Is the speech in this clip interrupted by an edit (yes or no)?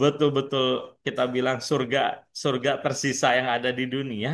no